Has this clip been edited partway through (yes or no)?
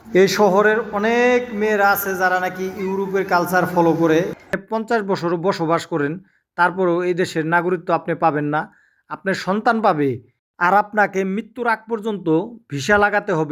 yes